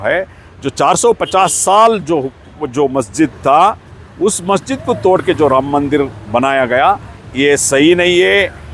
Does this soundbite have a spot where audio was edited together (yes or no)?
no